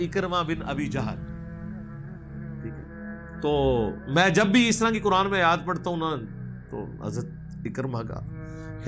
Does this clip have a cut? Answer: yes; 2 cuts; at 1.0 s, 3.4 s

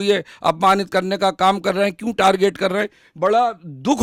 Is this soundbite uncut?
yes; 0 cuts

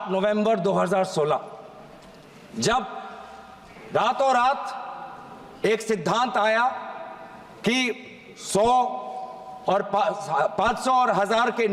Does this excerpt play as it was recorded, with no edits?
yes; 0 cuts

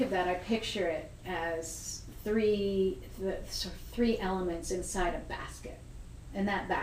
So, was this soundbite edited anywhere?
yes; 1 cut; at 5.8 s

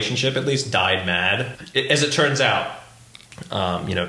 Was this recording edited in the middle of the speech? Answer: yes; 1 cut; at 1.6 s

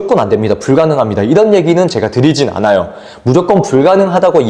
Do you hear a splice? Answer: no; 0 cuts

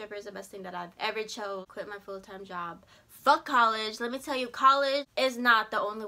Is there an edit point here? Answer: yes; 2 cuts; at 1.7 s, 5.1 s

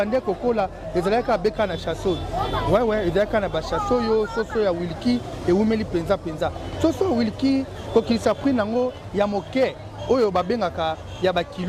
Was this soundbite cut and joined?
no; 0 cuts

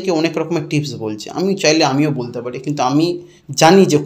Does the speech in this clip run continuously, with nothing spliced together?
yes; 0 cuts

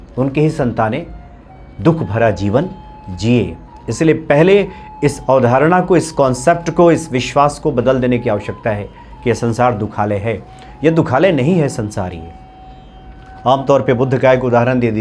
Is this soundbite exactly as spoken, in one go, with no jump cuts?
yes; 0 cuts

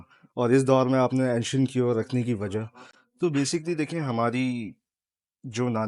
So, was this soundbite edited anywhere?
no; 0 cuts

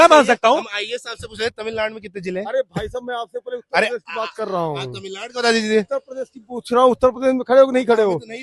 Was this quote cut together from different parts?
no; 0 cuts

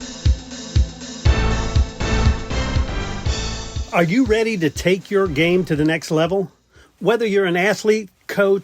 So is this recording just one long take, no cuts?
no; 1 cut; at 3.7 s

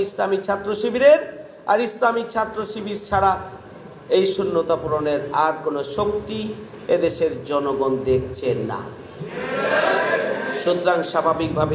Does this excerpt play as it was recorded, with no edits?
yes; 0 cuts

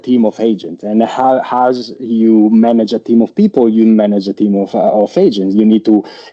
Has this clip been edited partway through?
no; 0 cuts

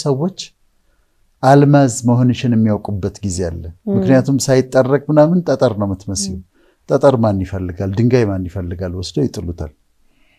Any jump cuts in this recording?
no; 0 cuts

